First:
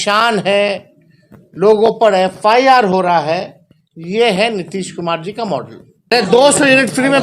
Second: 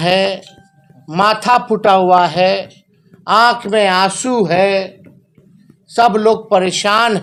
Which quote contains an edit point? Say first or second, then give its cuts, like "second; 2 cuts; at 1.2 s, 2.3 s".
first; 1 cut; at 6.1 s